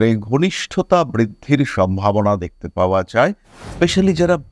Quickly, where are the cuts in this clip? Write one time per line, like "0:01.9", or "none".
0:03.6